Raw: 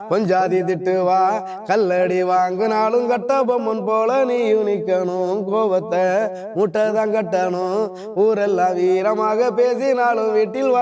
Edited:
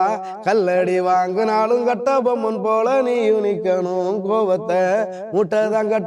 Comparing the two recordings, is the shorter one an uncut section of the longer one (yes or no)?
yes